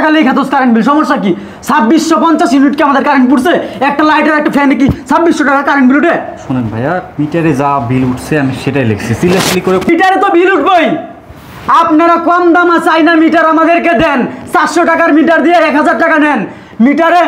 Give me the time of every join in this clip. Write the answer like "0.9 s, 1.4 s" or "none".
none